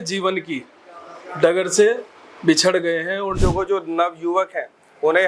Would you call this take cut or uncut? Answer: cut